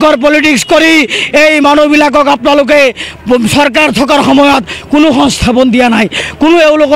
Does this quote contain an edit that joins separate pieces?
no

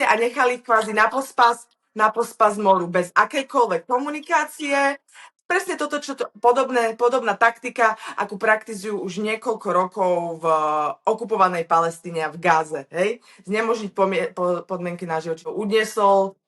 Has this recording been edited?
yes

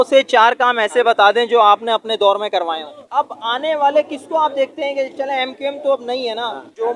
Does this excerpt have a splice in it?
yes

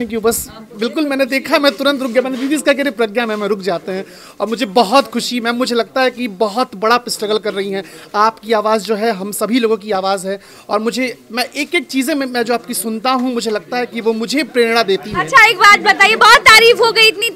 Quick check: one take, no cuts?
yes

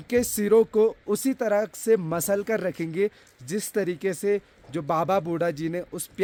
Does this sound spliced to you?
no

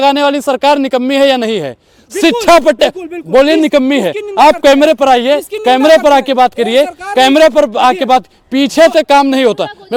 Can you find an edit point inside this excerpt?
no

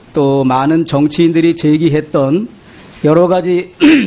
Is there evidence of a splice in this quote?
yes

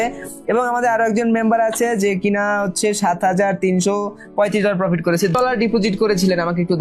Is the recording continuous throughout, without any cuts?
no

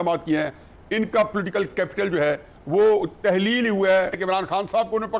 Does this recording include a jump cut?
yes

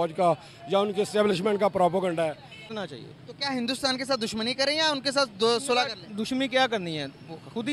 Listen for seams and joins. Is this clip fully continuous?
no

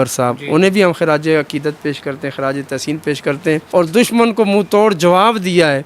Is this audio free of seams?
no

